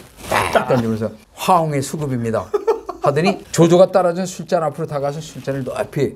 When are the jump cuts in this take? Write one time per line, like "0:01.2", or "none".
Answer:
0:03.4